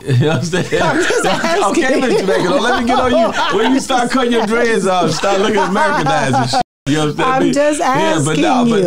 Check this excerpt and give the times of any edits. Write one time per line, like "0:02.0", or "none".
none

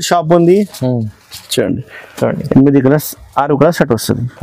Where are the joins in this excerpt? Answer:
none

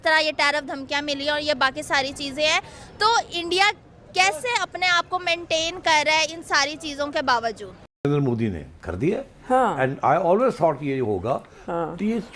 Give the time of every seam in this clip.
0:08.0

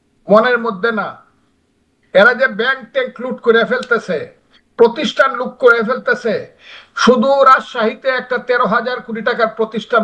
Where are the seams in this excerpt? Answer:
none

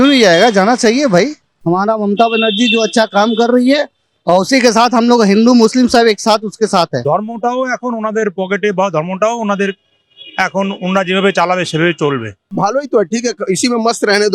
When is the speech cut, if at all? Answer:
0:01.5
0:07.0
0:12.5

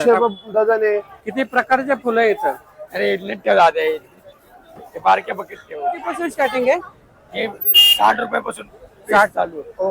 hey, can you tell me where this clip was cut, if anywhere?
0:01.2
0:06.2

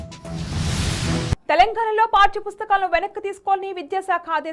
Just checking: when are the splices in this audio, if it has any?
0:01.3

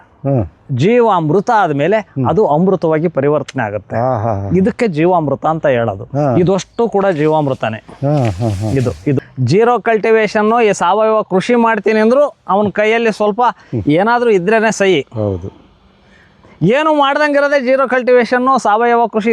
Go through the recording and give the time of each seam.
0:09.2

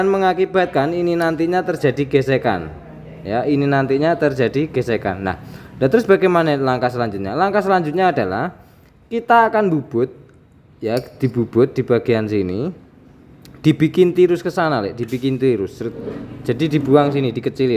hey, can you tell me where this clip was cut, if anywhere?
none

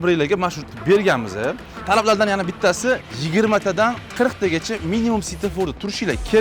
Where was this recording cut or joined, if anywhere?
0:01.7
0:03.1
0:04.0

